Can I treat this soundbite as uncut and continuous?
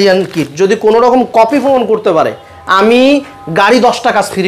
yes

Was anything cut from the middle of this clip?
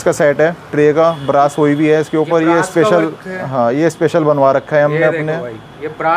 no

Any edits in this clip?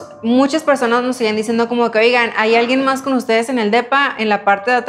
no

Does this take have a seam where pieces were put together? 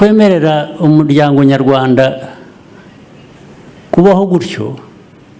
no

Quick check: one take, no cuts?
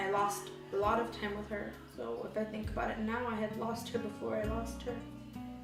yes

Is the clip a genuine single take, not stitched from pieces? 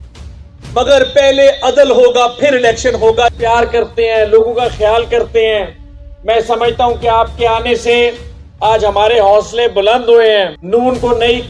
no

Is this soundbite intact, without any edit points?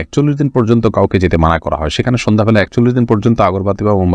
yes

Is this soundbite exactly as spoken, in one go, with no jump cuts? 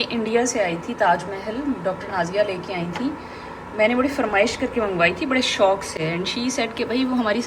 yes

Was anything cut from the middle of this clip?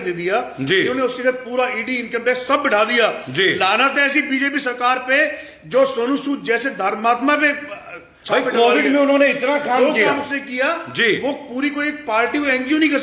no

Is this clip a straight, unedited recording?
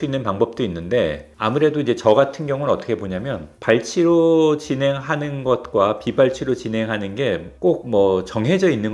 yes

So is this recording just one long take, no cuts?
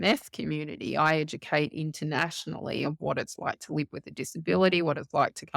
yes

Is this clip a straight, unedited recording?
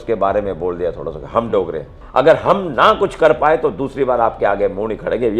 no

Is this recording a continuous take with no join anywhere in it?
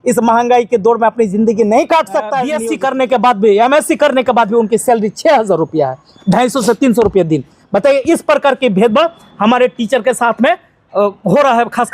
no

